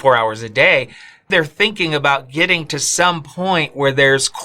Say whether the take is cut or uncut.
cut